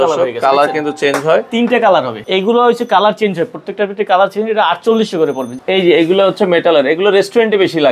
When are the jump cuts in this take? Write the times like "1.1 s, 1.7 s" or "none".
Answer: 2.2 s, 5.6 s